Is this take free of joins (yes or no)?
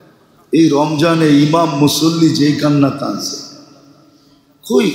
yes